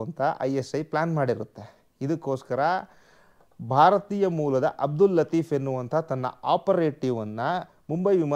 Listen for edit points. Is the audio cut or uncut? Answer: uncut